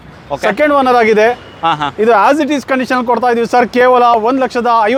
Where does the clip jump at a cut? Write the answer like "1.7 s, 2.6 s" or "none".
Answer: none